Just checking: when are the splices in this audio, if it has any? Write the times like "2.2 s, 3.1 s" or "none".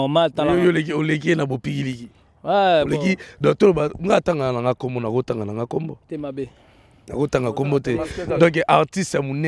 none